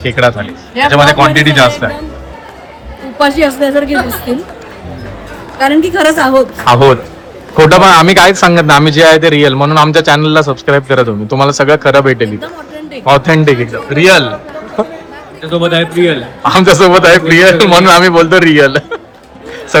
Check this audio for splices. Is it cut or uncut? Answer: uncut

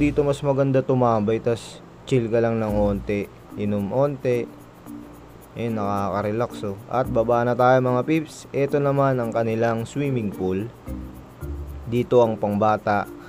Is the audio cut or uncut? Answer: uncut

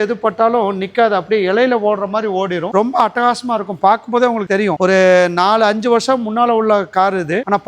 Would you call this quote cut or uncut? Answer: uncut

